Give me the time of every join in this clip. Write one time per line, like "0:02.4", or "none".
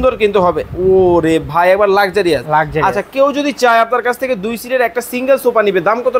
none